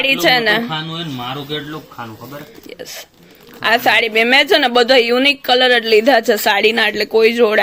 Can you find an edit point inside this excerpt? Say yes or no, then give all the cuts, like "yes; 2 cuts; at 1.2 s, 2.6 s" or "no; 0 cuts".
no; 0 cuts